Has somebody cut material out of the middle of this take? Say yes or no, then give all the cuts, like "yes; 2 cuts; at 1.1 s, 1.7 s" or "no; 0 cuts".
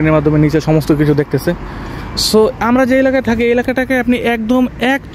no; 0 cuts